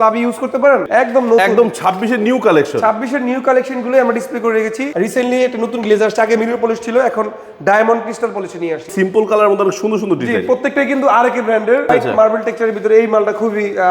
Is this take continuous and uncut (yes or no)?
no